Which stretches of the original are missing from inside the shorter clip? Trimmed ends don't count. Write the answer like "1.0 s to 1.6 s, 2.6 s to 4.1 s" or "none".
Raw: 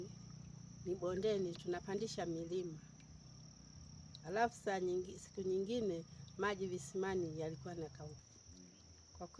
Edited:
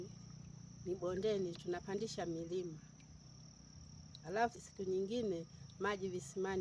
4.6 s to 5.2 s